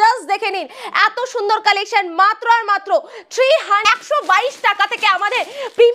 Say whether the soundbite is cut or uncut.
cut